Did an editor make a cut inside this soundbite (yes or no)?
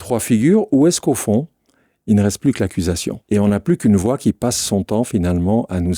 yes